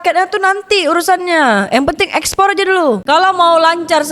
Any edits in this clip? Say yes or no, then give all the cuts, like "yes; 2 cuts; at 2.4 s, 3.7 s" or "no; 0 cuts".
yes; 1 cut; at 3.1 s